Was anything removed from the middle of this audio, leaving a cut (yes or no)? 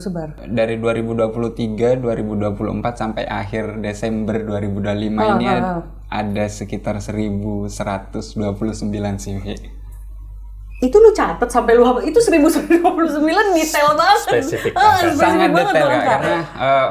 no